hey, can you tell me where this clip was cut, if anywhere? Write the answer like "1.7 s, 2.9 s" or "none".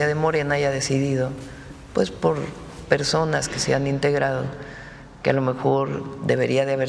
none